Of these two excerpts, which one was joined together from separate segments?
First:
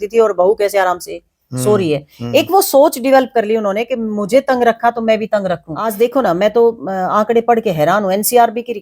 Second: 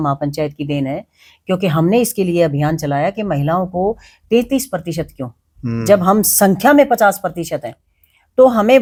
first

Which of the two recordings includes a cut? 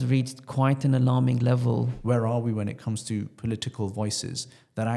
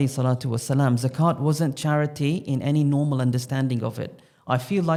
first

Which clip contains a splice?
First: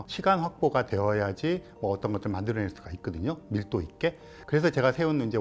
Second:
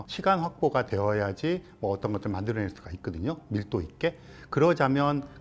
first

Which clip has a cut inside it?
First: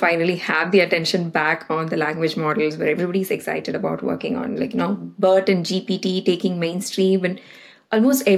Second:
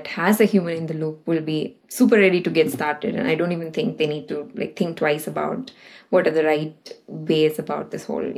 second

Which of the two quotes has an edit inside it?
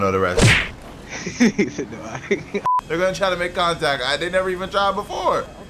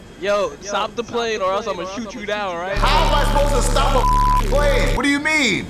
first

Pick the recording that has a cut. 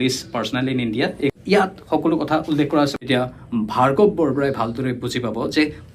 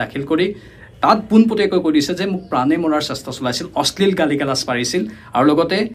first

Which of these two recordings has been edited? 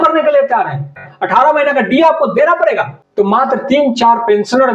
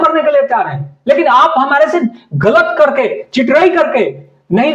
first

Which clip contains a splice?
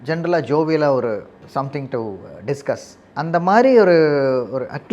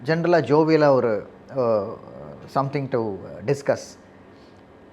first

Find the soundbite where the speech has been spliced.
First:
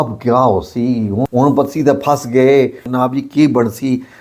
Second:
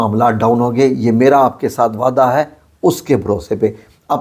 first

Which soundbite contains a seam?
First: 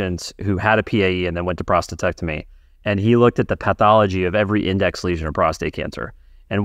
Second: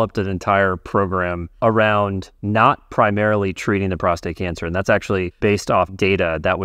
second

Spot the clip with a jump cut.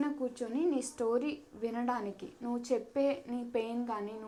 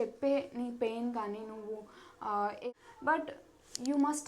second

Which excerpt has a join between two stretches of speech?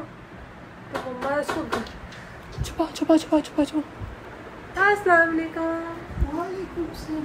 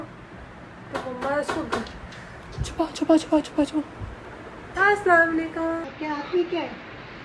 second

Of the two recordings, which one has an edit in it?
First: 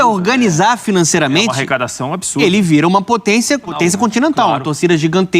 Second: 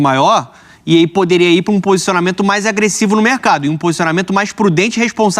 first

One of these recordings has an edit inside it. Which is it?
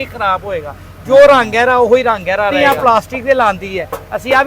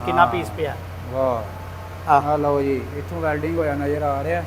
first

